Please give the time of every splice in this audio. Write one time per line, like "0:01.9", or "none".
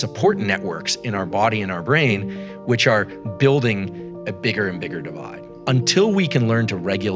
0:05.5